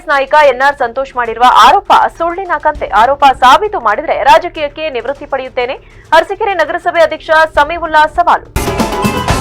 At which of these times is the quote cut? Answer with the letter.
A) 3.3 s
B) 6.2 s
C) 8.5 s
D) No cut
C